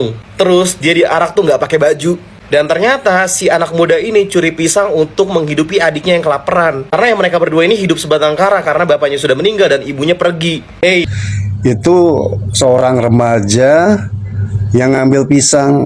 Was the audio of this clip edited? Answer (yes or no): yes